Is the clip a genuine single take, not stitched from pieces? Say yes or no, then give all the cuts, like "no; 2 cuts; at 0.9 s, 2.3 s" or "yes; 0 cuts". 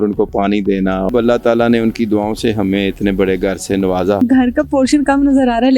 no; 2 cuts; at 1.1 s, 4.2 s